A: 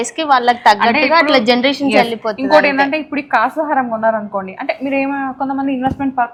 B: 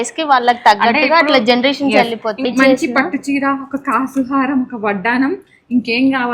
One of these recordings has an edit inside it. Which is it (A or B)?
B